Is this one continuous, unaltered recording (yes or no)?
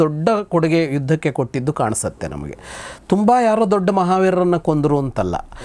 yes